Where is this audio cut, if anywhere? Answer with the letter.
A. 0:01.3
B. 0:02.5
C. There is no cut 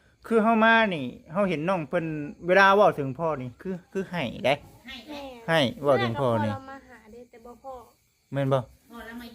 C